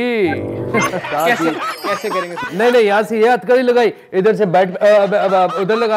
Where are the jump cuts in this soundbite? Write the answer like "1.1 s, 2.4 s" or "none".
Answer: 1.0 s, 2.4 s